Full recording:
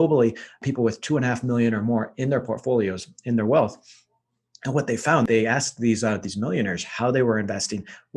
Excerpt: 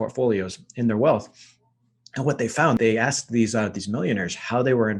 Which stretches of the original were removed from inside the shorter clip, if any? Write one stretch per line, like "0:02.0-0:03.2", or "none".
none